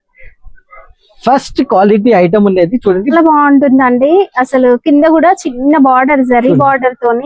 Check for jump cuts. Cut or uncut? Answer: cut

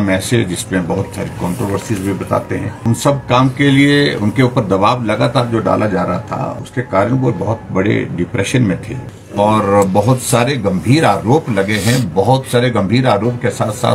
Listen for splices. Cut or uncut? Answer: cut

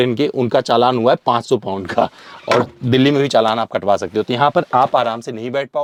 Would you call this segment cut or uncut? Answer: uncut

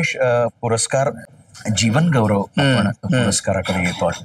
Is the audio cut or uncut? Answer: cut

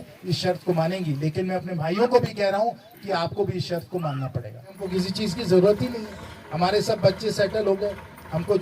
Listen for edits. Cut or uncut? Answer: cut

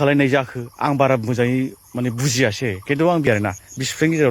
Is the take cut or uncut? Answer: cut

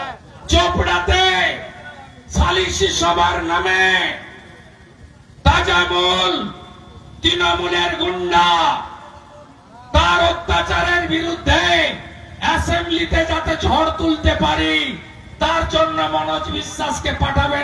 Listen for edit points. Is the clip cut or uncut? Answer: uncut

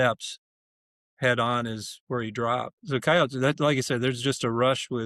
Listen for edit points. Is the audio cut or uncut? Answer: cut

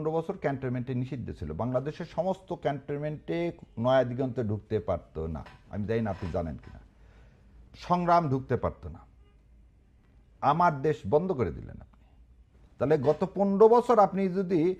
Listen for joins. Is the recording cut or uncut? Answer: uncut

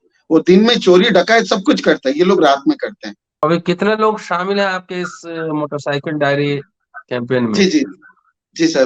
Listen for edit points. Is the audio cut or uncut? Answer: cut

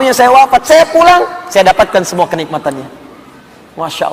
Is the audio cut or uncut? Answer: uncut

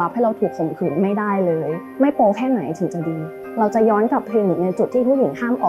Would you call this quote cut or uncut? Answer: cut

